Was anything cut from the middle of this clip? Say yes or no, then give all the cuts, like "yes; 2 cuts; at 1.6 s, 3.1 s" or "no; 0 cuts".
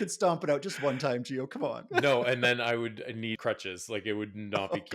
yes; 1 cut; at 3.4 s